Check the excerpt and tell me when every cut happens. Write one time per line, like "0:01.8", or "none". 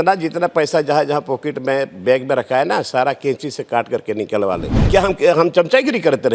0:04.7